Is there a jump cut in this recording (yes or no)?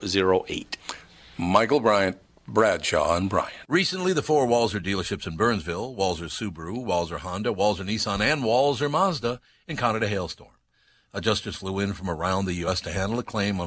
yes